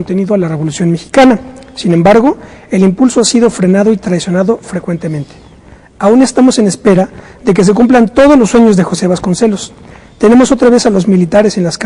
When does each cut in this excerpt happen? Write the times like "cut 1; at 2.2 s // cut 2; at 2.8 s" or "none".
cut 1; at 3.4 s